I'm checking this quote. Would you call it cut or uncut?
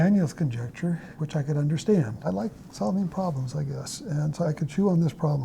cut